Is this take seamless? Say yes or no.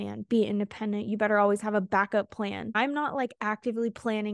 no